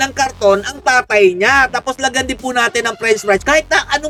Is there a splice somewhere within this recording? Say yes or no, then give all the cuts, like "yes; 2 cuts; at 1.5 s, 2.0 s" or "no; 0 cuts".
no; 0 cuts